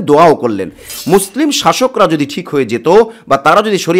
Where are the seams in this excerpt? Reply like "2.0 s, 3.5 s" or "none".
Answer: 0.9 s